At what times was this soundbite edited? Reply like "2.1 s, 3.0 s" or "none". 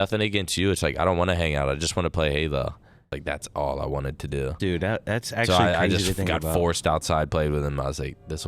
3.1 s